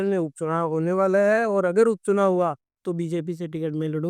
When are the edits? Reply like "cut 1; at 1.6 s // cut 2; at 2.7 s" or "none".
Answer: none

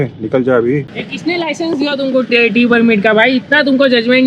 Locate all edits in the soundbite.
cut 1; at 1.0 s

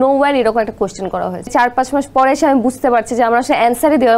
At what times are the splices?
cut 1; at 1.5 s

